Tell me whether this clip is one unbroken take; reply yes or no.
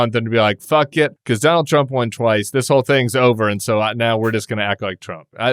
no